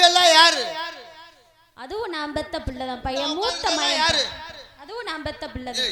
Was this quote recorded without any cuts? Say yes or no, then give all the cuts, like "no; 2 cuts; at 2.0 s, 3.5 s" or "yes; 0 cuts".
yes; 0 cuts